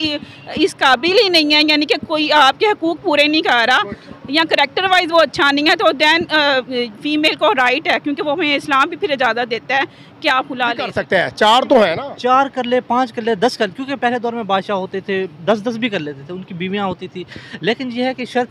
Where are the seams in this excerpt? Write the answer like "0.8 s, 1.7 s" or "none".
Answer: 11.0 s

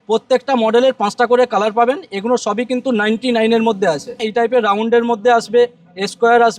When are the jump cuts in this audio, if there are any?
4.2 s

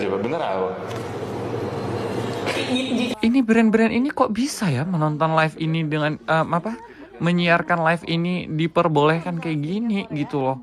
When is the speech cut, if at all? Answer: 3.1 s

